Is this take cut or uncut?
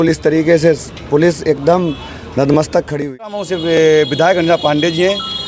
cut